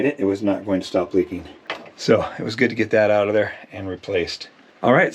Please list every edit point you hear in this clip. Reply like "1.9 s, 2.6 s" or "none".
1.6 s